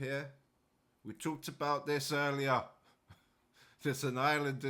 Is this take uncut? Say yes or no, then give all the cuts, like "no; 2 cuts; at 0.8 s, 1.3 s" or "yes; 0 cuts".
yes; 0 cuts